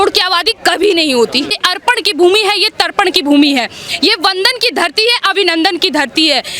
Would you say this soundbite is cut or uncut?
cut